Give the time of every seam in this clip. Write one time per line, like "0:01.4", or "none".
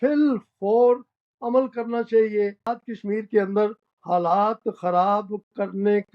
0:02.7